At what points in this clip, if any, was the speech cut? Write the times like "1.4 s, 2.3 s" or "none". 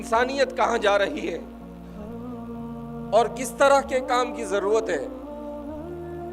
1.4 s, 2.8 s, 5.1 s